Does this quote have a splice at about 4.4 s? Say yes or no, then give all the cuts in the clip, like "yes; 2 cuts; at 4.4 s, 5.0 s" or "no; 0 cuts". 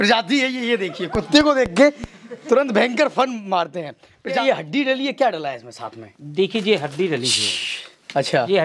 yes; 1 cut; at 4.4 s